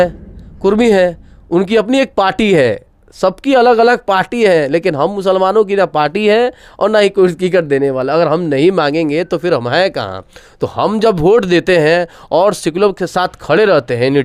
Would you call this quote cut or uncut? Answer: uncut